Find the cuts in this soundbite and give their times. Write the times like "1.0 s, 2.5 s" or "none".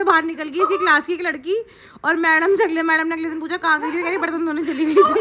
none

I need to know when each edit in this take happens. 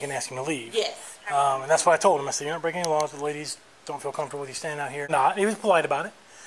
5.1 s

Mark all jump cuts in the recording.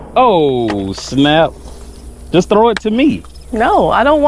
none

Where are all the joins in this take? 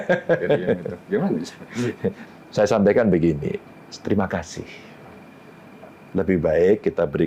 2.2 s

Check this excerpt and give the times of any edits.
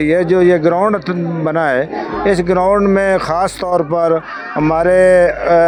none

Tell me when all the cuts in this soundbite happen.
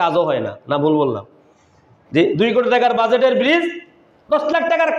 none

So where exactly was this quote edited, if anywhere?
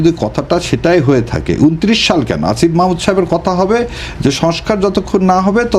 none

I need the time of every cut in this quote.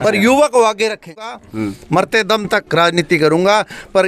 1.4 s

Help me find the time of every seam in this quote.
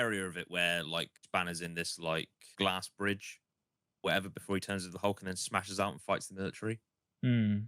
1.2 s, 2.5 s

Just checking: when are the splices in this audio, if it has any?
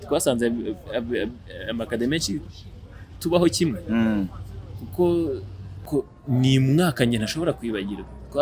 5.8 s

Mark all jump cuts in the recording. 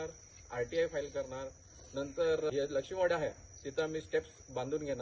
2.5 s

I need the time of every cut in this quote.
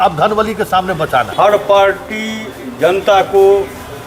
1.3 s

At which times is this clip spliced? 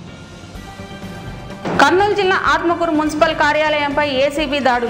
1.5 s

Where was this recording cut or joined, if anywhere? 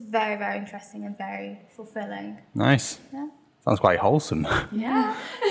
none

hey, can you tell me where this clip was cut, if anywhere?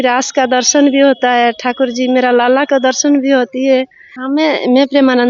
4.1 s

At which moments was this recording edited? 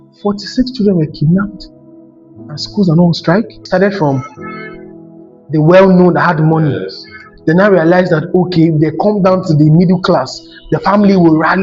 3.6 s

